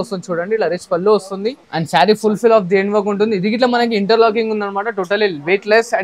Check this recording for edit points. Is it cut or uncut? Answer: cut